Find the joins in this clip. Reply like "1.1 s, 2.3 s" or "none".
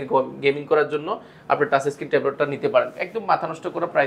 none